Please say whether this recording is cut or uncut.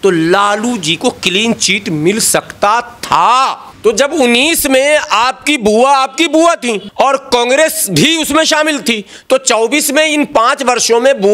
cut